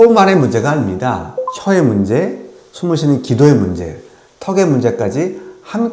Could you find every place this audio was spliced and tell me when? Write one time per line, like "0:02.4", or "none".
none